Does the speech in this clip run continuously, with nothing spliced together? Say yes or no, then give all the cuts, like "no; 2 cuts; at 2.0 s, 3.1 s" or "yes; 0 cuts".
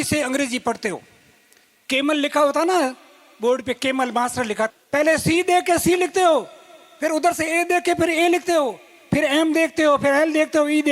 no; 1 cut; at 4.7 s